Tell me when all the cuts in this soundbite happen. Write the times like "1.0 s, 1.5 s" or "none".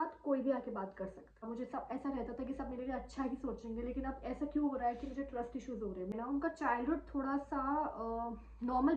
1.4 s, 6.1 s